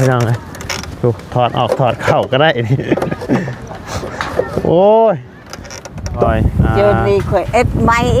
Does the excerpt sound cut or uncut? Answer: cut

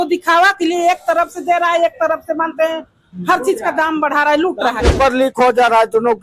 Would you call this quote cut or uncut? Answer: cut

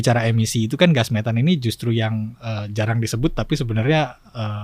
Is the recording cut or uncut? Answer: uncut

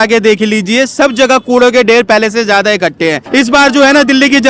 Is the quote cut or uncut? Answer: cut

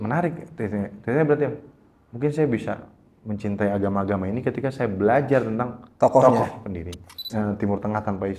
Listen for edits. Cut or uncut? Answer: cut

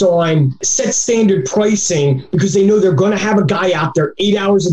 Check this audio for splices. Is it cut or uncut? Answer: uncut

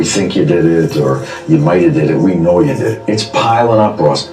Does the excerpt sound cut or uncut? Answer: cut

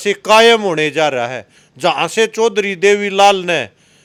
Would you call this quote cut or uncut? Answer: uncut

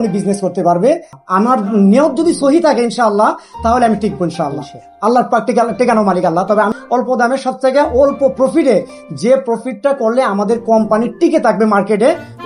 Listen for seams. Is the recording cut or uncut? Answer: cut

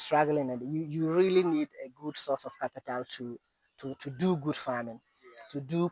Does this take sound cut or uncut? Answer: uncut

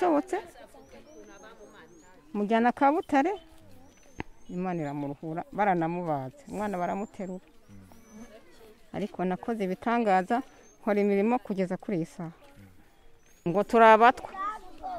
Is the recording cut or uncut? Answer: cut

